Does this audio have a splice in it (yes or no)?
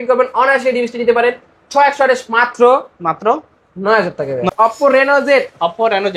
yes